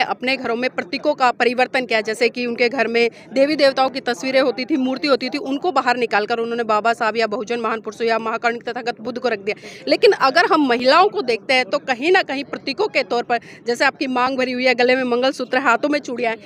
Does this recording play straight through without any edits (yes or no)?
yes